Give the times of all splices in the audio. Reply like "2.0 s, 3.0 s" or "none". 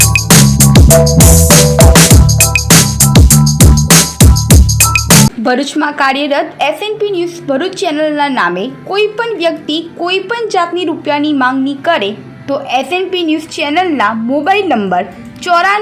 5.4 s